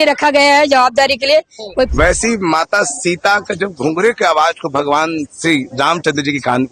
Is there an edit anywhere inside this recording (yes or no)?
yes